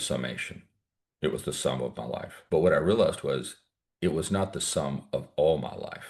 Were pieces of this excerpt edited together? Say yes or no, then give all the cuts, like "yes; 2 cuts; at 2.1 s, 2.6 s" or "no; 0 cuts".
yes; 1 cut; at 2.3 s